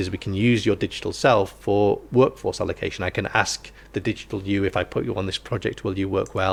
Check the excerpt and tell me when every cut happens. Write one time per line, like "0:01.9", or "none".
none